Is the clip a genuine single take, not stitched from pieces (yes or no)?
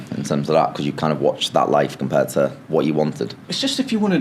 yes